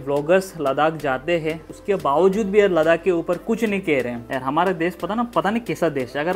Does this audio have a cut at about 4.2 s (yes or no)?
yes